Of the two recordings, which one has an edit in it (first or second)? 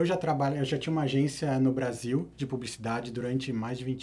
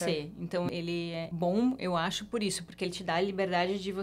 second